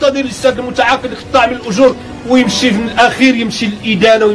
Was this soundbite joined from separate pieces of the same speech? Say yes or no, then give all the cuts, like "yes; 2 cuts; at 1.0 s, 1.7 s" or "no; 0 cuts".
yes; 1 cut; at 2.8 s